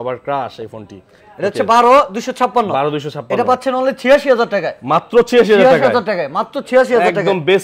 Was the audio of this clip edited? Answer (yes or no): no